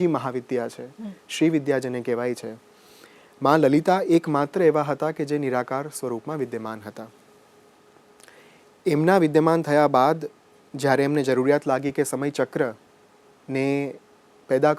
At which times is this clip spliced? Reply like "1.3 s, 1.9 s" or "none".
none